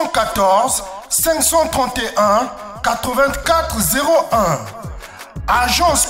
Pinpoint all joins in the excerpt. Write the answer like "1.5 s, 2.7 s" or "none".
none